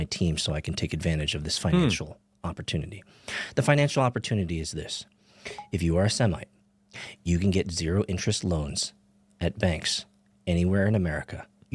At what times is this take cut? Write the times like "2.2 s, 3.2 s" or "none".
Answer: 6.1 s